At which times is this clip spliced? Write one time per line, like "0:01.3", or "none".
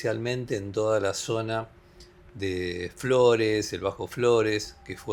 none